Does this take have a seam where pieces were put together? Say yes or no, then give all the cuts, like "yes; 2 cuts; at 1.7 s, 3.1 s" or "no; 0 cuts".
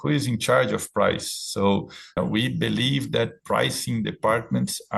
yes; 1 cut; at 2.2 s